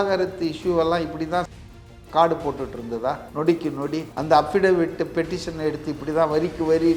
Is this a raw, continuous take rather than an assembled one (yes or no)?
yes